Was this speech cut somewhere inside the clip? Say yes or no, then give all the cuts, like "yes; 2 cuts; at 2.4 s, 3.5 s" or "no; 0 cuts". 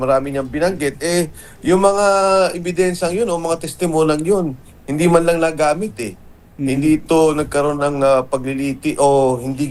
no; 0 cuts